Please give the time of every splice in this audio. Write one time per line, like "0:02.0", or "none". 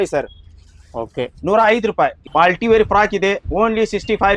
0:02.2